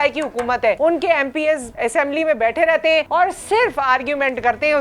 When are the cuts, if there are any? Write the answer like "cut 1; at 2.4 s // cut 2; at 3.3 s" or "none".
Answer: cut 1; at 0.8 s // cut 2; at 1.7 s // cut 3; at 3.1 s